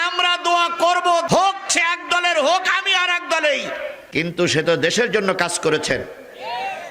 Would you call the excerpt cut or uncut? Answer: cut